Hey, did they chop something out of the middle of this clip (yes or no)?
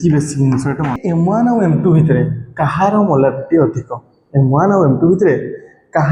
yes